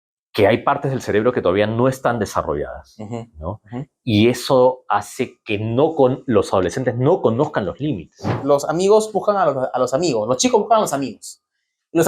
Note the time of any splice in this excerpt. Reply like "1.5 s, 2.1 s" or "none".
8.3 s

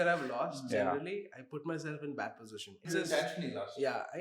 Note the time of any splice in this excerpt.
2.8 s

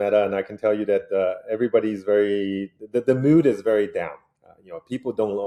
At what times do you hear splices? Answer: none

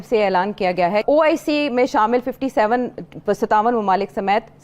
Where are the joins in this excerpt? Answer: 1.0 s

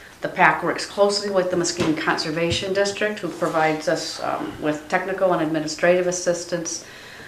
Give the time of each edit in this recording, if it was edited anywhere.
3.3 s

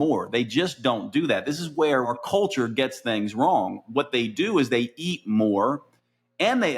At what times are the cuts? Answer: 2.1 s

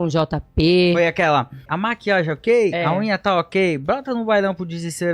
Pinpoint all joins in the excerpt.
1.7 s

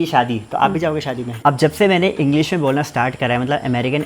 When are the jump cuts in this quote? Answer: 1.3 s

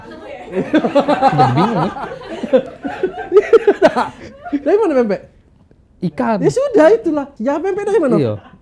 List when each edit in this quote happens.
7.3 s

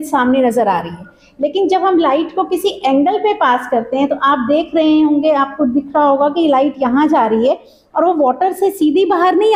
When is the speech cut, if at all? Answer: none

